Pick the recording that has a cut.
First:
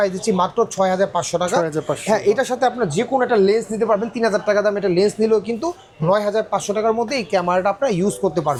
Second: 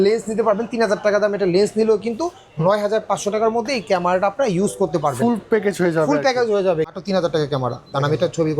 second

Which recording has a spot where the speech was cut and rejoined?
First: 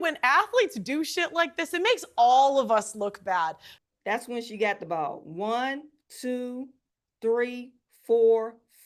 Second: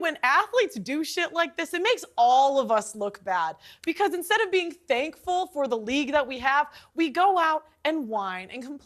first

